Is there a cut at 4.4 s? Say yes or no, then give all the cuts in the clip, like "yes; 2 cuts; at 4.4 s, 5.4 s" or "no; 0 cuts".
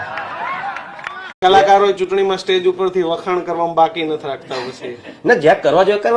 no; 1 cut; at 1.3 s